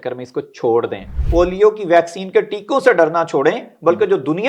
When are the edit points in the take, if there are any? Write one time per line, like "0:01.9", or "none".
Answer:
0:01.2